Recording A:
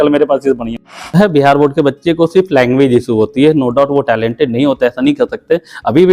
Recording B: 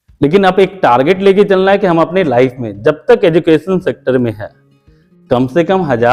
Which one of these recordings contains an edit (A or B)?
A